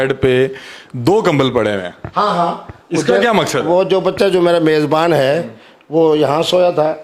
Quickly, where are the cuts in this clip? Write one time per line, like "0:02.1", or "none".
none